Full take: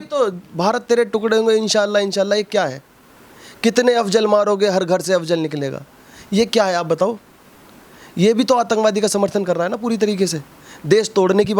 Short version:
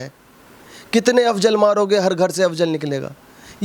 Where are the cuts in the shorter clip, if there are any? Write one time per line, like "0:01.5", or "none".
none